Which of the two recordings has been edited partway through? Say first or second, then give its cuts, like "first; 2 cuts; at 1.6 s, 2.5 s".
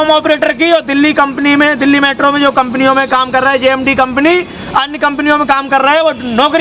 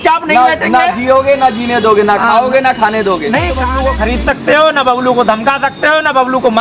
second; 1 cut; at 3.7 s